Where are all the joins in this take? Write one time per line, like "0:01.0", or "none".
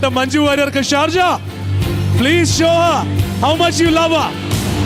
none